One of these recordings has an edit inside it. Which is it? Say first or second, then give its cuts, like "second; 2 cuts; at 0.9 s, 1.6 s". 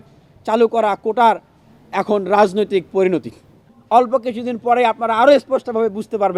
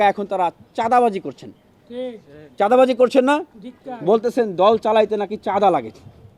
first; 1 cut; at 3.8 s